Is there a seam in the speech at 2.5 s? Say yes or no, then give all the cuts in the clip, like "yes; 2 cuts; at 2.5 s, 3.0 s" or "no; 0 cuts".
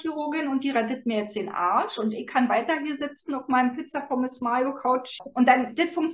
no; 1 cut; at 5.2 s